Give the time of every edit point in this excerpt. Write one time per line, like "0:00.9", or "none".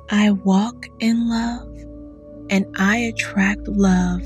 none